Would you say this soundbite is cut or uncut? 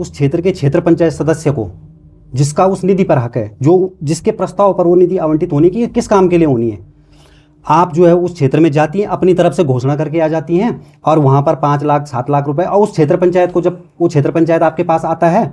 uncut